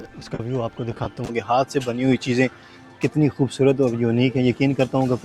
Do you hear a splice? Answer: yes; 1 cut; at 1.3 s

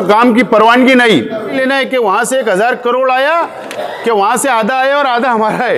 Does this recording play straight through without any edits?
no; 1 cut; at 1.5 s

